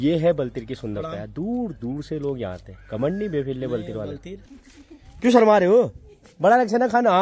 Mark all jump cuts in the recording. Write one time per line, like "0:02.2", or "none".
none